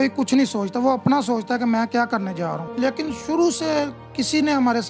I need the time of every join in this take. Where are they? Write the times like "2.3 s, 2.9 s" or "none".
2.6 s